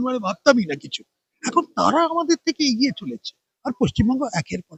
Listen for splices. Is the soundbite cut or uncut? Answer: uncut